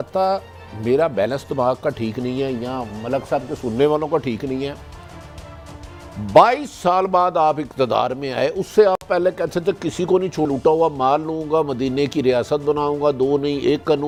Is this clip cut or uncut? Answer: uncut